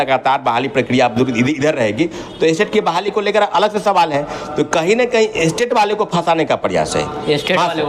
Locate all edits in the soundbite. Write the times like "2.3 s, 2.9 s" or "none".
none